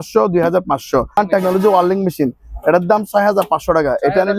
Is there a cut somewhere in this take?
yes; 1 cut; at 1.1 s

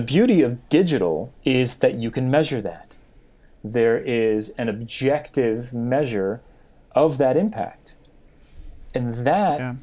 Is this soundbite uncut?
no; 1 cut; at 1.3 s

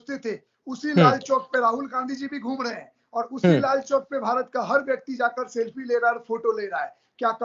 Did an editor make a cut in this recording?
no; 0 cuts

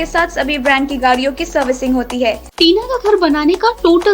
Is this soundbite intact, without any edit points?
no; 1 cut; at 2.5 s

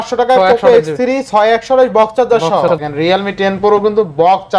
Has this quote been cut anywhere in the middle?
yes; 1 cut; at 2.7 s

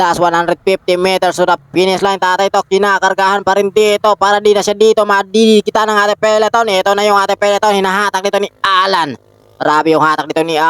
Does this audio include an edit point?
yes; 1 cut; at 1.6 s

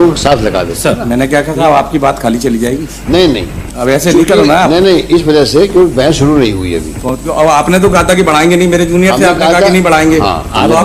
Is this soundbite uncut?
yes; 0 cuts

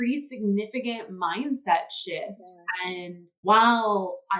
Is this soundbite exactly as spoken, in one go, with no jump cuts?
no; 1 cut; at 3.4 s

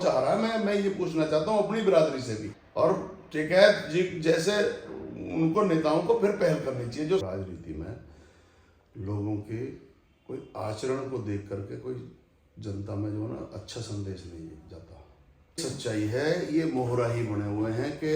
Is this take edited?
yes; 3 cuts; at 2.5 s, 7.2 s, 15.6 s

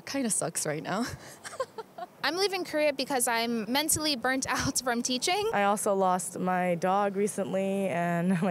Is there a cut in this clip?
yes; 2 cuts; at 2.1 s, 5.5 s

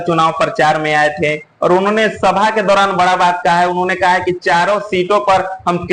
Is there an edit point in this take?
no; 0 cuts

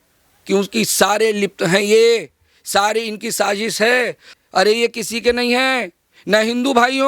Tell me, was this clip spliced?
yes; 1 cut; at 4.2 s

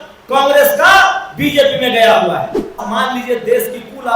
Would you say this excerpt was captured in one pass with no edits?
no; 1 cut; at 2.8 s

